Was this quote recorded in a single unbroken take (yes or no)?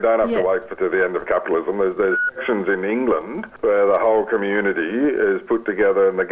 no